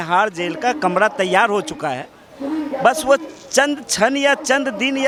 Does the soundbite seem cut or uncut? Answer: uncut